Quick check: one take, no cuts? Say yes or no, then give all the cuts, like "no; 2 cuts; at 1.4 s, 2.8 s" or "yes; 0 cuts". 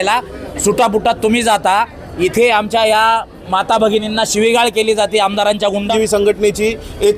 no; 1 cut; at 5.9 s